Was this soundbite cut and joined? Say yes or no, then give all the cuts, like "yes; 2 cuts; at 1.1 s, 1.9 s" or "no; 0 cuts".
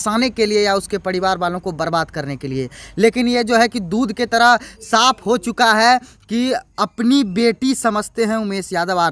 no; 0 cuts